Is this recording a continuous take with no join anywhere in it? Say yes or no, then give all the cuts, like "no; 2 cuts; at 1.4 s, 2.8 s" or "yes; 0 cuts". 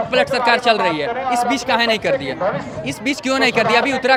yes; 0 cuts